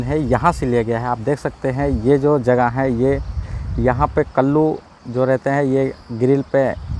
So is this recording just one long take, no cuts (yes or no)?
yes